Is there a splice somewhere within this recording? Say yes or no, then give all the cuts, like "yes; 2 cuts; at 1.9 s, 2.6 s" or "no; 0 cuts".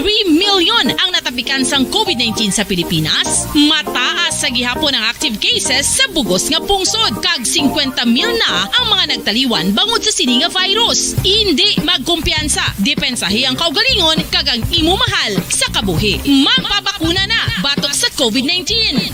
no; 0 cuts